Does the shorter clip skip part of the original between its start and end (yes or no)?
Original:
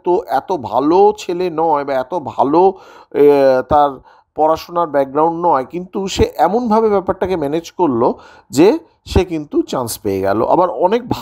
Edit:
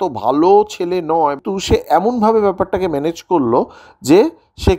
yes